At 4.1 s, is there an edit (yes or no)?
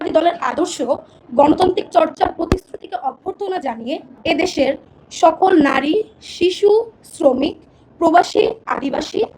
yes